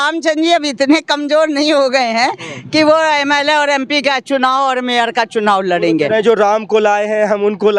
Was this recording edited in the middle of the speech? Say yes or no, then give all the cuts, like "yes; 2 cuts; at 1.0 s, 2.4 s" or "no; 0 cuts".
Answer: no; 0 cuts